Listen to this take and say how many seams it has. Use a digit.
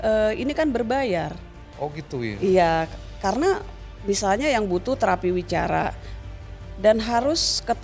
1